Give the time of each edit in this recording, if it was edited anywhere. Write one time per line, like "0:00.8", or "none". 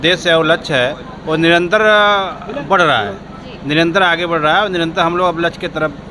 none